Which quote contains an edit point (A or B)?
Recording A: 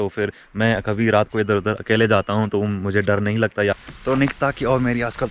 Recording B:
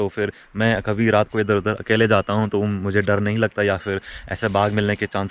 A